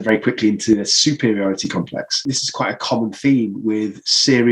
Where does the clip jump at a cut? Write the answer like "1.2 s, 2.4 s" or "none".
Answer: 2.4 s

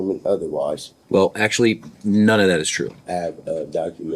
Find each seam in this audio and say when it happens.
0.9 s, 3.0 s

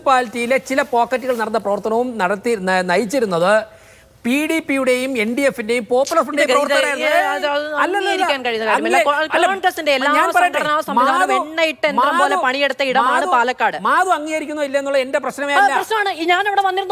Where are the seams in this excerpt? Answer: none

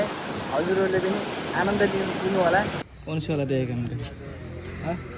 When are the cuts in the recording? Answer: 2.8 s

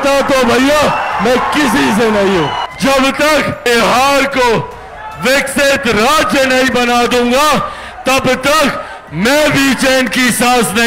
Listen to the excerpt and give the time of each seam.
2.6 s, 3.7 s

